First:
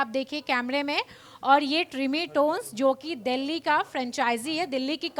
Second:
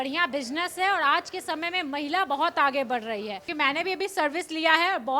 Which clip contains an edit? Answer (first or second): second